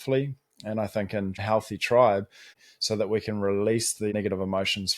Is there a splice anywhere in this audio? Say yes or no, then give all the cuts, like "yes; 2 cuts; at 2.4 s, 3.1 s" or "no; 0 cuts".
yes; 3 cuts; at 1.4 s, 2.5 s, 4.1 s